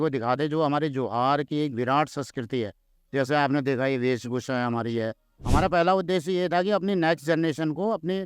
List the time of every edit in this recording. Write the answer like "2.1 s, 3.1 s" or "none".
5.3 s